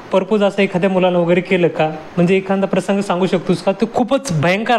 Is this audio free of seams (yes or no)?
yes